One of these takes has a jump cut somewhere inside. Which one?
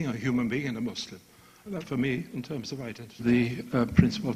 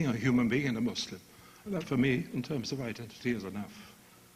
second; 1 cut; at 3.0 s

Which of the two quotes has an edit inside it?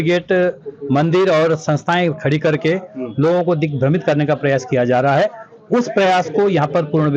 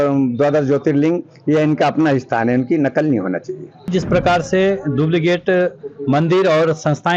second; 1 cut; at 3.8 s

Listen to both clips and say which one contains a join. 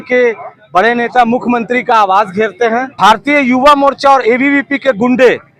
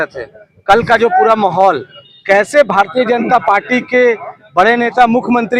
first; 1 cut; at 2.9 s

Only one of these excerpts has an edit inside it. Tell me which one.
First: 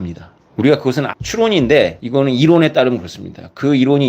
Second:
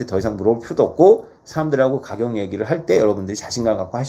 first; 2 cuts; at 1.1 s, 2.0 s

